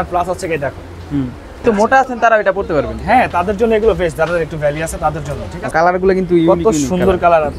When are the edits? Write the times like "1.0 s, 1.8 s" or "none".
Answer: 1.6 s, 5.6 s